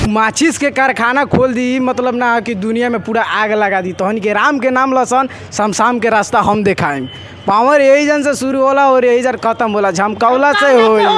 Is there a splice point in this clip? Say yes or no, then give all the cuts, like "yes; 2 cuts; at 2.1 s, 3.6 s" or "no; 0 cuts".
no; 0 cuts